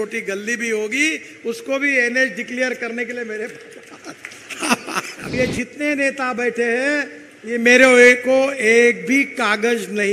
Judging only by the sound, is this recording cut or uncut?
cut